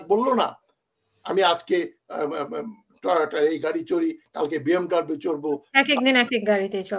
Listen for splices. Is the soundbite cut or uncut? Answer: uncut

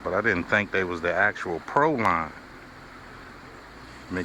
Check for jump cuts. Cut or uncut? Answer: uncut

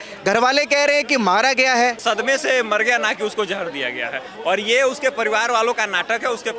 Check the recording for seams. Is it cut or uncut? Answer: cut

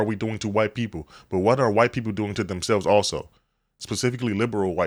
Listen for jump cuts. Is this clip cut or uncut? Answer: uncut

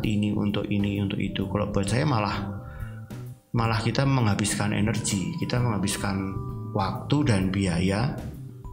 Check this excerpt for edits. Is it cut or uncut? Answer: uncut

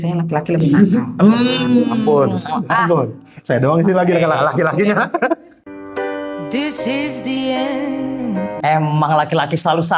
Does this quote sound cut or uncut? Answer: cut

